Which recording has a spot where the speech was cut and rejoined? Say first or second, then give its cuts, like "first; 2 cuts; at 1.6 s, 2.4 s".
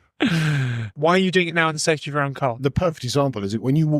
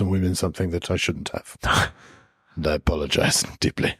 first; 2 cuts; at 1.0 s, 2.6 s